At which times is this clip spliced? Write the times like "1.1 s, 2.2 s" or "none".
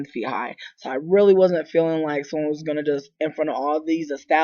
3.1 s